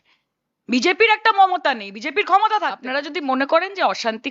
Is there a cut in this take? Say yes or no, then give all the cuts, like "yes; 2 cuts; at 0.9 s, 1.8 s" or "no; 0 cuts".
yes; 1 cut; at 2.9 s